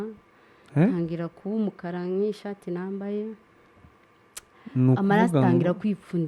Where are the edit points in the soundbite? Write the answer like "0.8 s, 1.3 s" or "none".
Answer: none